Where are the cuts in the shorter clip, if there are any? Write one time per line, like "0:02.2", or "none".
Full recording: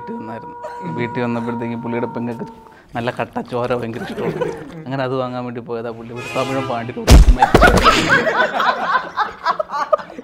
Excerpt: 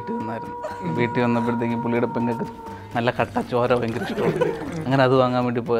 none